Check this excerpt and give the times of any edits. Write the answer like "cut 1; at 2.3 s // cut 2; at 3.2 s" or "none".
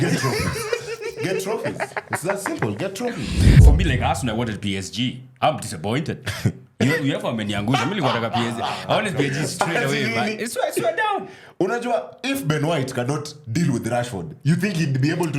cut 1; at 3.6 s